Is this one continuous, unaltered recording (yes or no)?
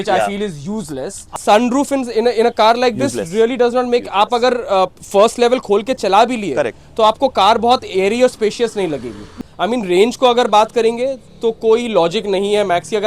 no